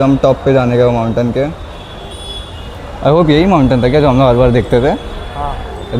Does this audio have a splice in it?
no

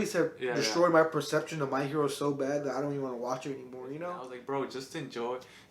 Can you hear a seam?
yes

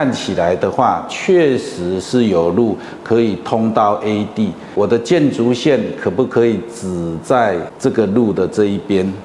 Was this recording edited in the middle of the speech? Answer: yes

